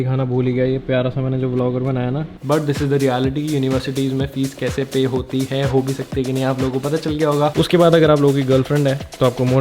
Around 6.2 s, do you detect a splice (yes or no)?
no